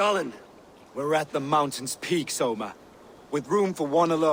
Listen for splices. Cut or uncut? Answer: uncut